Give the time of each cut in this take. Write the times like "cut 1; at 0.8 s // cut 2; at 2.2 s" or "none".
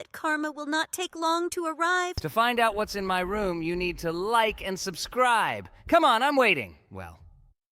cut 1; at 2.1 s